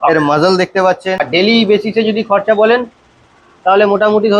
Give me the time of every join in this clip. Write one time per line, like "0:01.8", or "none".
0:01.2